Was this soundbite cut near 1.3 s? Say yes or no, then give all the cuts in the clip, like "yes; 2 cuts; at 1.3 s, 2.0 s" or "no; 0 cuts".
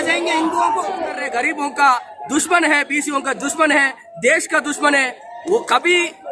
yes; 1 cut; at 1.3 s